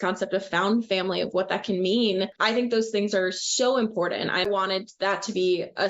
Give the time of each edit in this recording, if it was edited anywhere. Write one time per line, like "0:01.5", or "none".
0:02.4
0:04.4